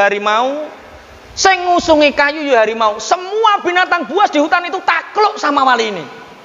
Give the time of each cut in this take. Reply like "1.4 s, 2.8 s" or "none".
none

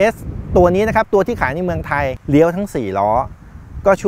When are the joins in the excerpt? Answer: 2.2 s

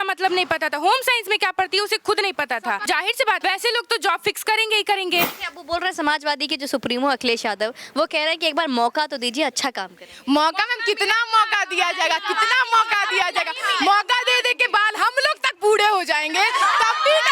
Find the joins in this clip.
3.2 s, 5.4 s

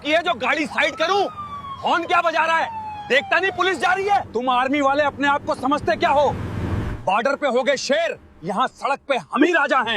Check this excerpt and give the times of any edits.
4.3 s

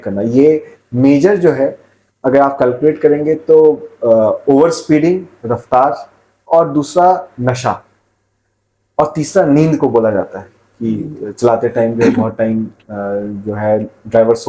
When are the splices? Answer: none

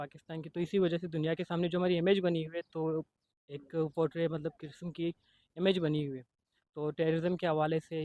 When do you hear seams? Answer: none

